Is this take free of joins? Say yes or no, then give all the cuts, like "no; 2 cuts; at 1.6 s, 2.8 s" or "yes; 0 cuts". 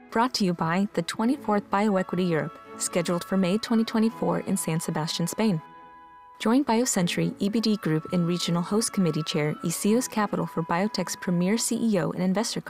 yes; 0 cuts